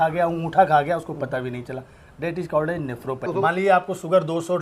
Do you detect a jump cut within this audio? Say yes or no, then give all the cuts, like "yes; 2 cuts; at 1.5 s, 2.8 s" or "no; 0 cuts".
yes; 1 cut; at 3.3 s